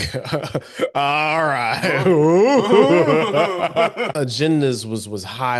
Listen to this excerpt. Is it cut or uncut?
cut